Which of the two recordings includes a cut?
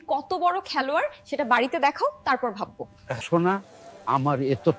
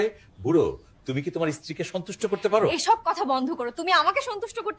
first; 1 cut; at 3.2 s

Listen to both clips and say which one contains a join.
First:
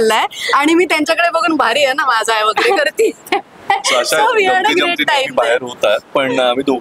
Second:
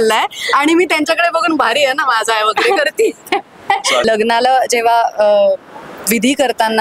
second; 1 cut; at 4.0 s

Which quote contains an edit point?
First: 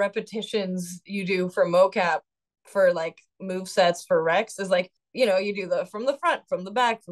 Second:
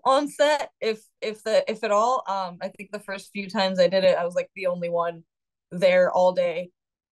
first; 1 cut; at 5.0 s

